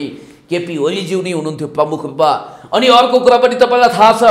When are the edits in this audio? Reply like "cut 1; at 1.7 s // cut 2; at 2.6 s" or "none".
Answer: none